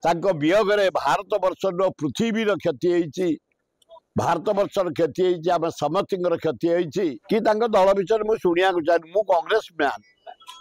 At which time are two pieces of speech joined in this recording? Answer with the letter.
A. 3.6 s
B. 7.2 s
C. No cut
B